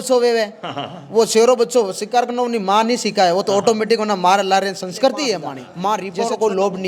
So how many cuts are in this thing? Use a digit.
1